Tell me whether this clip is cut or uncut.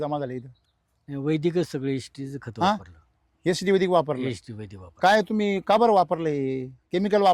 uncut